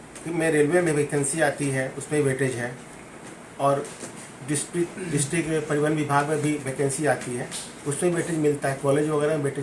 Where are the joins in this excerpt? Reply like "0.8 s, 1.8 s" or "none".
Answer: none